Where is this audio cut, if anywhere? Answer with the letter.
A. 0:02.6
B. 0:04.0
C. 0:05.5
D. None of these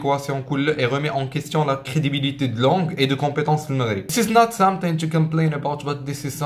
B